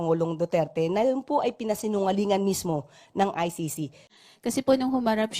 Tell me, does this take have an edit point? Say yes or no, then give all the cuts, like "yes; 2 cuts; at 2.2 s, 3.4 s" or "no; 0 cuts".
yes; 1 cut; at 4.1 s